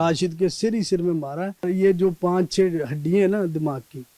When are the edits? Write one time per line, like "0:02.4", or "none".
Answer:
0:01.7